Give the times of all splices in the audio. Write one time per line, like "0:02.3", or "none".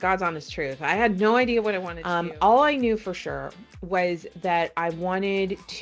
0:01.9